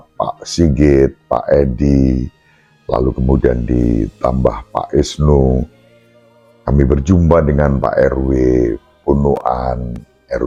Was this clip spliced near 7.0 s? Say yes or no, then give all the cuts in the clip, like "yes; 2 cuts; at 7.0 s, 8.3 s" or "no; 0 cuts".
no; 0 cuts